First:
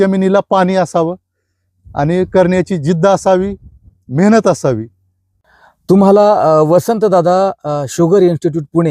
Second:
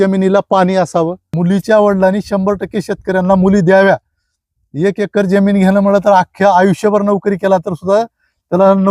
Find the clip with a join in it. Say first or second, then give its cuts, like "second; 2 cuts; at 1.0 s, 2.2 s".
second; 1 cut; at 1.2 s